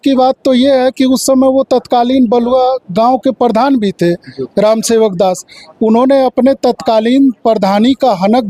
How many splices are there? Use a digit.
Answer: 0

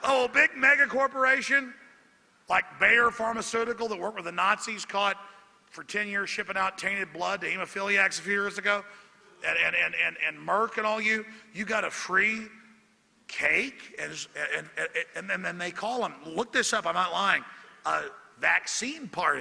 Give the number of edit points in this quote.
0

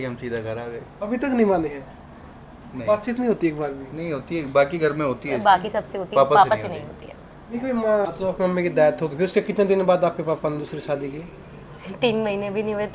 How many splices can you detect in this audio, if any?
1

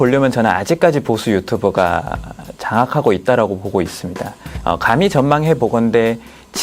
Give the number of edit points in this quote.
1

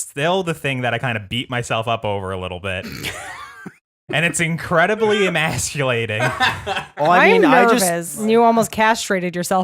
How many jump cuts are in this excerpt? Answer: 1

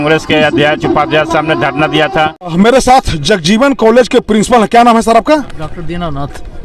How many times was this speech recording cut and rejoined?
1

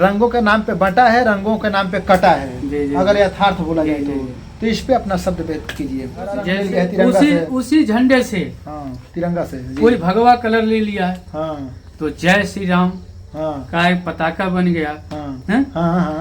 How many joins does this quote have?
1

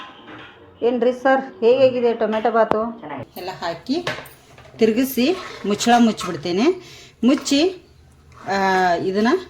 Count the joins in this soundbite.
1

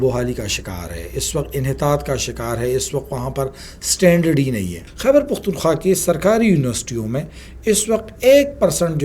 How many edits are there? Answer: 1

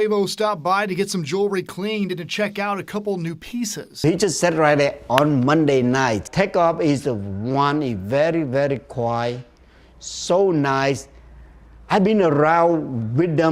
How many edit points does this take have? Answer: 0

